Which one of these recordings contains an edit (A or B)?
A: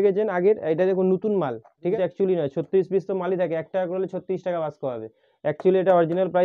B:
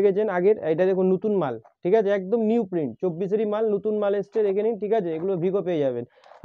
A